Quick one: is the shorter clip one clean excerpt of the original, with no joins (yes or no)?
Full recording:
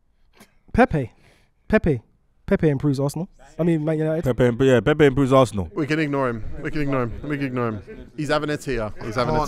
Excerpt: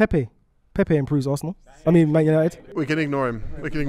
no